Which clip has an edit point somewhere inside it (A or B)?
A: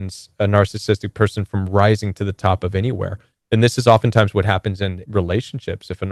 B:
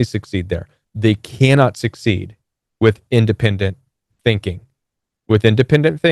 A